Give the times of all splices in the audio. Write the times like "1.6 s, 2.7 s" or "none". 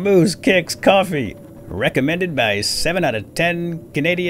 1.4 s